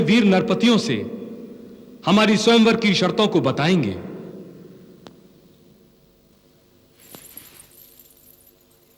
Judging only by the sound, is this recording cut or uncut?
uncut